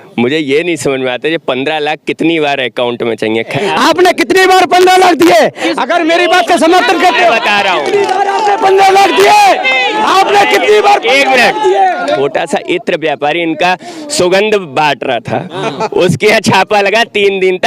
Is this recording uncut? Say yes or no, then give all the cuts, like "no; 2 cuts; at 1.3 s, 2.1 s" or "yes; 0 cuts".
no; 2 cuts; at 3.6 s, 12.2 s